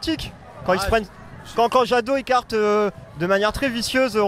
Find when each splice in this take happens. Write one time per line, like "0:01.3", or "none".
none

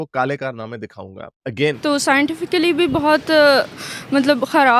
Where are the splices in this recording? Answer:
0:01.8

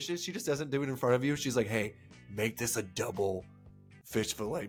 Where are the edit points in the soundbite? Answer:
none

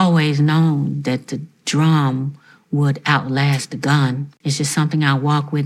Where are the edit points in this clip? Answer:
0:04.3

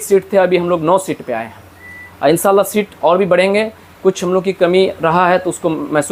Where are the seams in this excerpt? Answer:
none

